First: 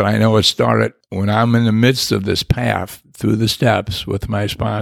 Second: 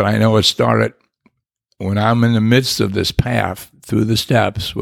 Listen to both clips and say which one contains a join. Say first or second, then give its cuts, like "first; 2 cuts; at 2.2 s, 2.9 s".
first; 1 cut; at 1.0 s